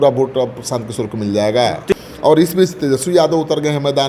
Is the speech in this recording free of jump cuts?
no; 1 cut; at 1.9 s

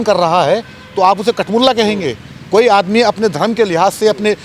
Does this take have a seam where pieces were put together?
no; 0 cuts

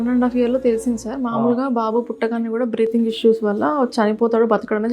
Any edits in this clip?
no; 0 cuts

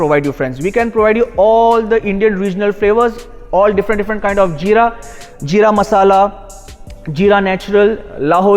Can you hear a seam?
no; 0 cuts

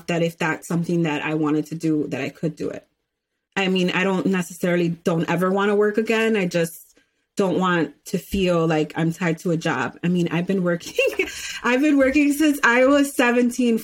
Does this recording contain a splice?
yes; 1 cut; at 3.4 s

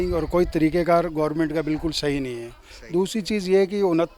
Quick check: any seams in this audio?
no; 0 cuts

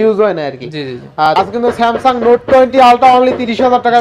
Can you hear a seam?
yes; 1 cut; at 1.3 s

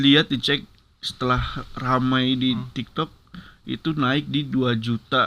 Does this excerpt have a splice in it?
no; 0 cuts

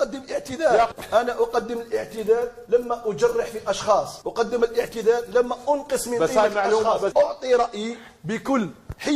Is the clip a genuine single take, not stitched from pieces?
no; 2 cuts; at 1.0 s, 7.1 s

